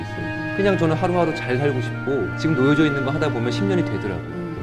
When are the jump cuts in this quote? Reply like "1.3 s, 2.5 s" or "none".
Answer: none